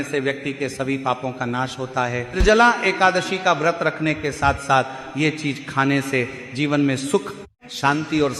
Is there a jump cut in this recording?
yes; 1 cut; at 2.4 s

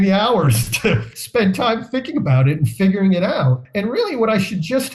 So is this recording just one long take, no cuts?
no; 2 cuts; at 1.1 s, 3.6 s

